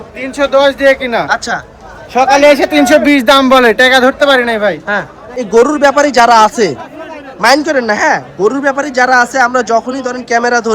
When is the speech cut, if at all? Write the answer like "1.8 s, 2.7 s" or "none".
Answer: 5.5 s